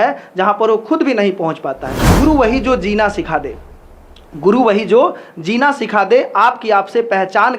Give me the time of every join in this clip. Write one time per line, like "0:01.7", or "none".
0:02.1